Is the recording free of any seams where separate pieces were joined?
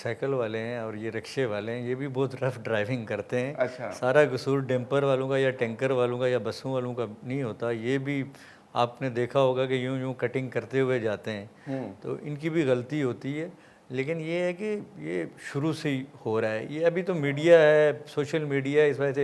yes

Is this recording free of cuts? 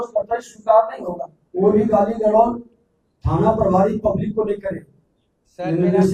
yes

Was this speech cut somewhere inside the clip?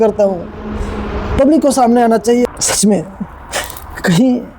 yes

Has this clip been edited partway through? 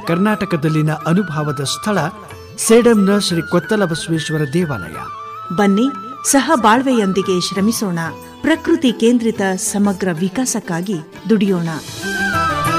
no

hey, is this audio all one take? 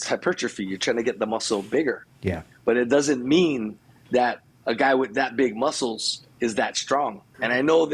yes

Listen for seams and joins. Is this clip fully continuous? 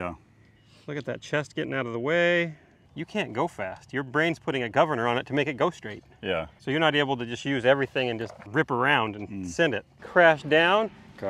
no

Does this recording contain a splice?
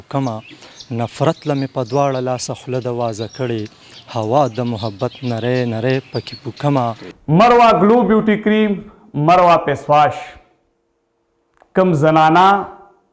yes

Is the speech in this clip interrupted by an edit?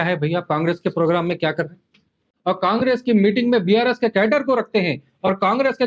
yes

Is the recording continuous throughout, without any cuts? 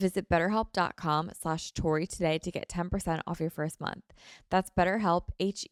yes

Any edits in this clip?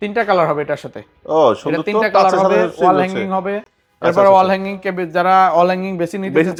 no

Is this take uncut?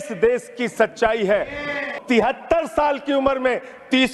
no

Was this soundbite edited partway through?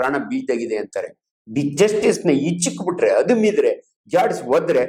no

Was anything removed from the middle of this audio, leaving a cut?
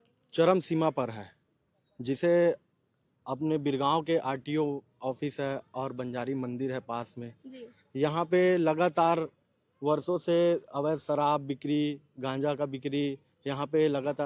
no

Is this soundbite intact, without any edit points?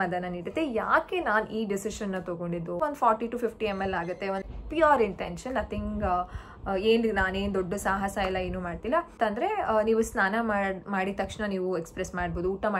no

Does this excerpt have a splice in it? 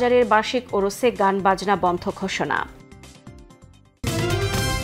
yes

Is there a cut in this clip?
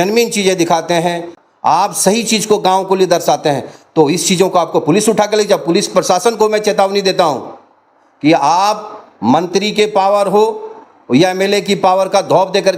yes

